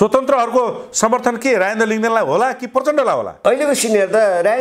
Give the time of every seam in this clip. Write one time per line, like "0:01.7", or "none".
0:03.3

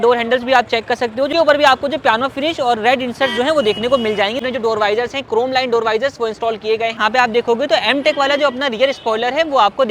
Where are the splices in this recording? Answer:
0:01.3
0:04.4
0:07.0

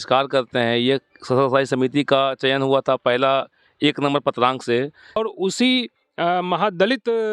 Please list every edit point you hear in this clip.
0:05.2

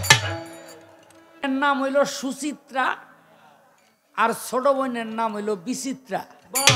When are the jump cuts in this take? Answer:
0:01.4

